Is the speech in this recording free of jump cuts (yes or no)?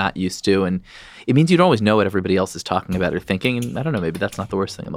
yes